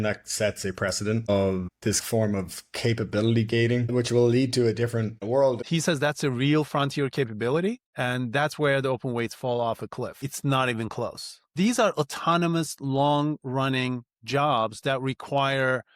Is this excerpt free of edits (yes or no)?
no